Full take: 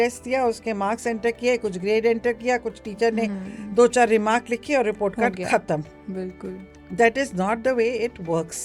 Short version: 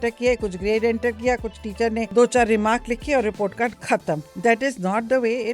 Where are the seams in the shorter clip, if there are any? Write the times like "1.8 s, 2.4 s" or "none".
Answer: 2.1 s, 4.3 s